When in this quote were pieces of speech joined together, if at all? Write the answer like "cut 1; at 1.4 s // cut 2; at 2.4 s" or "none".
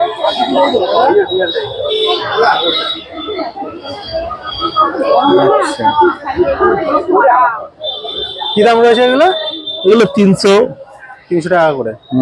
none